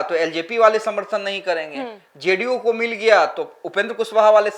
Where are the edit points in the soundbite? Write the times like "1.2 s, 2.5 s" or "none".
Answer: none